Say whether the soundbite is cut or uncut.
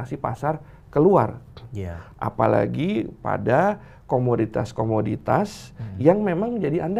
uncut